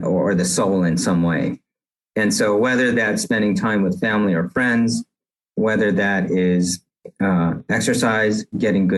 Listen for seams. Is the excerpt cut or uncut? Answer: uncut